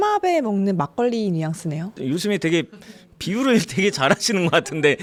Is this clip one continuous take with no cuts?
yes; 0 cuts

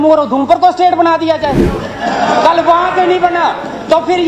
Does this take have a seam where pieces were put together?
no; 0 cuts

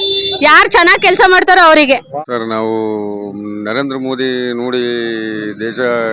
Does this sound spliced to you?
yes; 1 cut; at 2.1 s

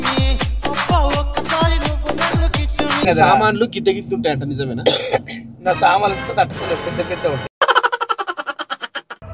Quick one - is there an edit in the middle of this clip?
yes; 1 cut; at 3.0 s

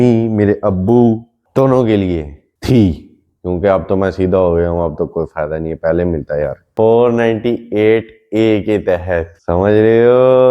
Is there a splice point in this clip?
yes; 1 cut; at 6.6 s

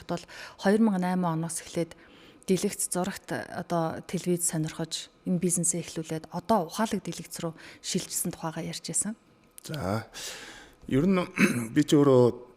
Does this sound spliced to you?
no; 0 cuts

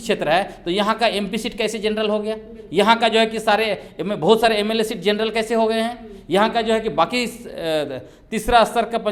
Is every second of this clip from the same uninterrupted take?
yes; 0 cuts

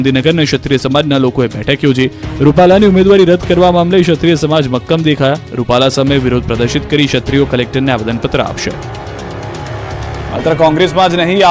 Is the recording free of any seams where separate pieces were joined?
no; 1 cut; at 7.1 s

